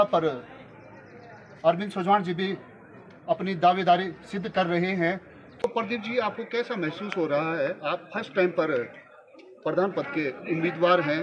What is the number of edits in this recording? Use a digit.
1